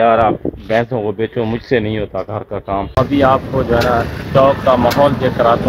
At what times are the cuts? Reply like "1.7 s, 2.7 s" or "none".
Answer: 2.9 s